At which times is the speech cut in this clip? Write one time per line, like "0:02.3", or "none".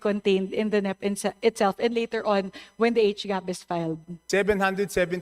0:04.1